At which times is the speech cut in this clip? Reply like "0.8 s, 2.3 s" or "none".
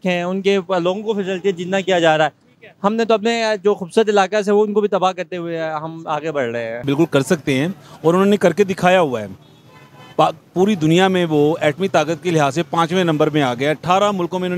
6.8 s